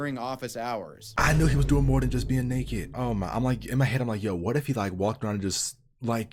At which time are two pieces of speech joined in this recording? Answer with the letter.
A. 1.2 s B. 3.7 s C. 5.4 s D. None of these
A